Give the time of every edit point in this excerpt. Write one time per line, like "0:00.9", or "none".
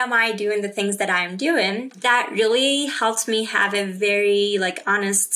0:01.9